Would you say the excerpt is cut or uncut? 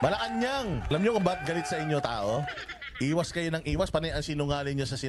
cut